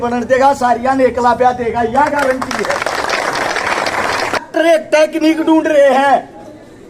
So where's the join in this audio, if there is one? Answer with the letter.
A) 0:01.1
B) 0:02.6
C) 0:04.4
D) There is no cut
C